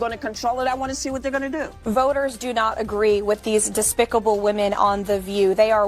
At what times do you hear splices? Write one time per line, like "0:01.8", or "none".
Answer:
0:01.9